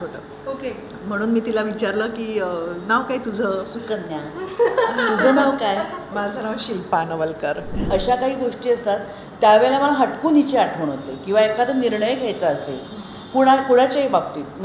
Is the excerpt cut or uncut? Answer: cut